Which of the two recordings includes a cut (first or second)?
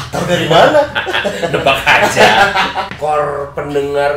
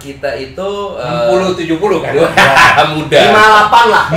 first